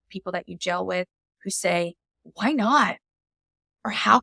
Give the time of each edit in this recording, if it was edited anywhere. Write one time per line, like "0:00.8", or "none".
none